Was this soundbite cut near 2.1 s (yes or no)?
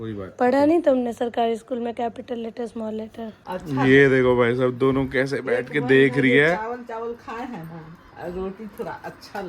no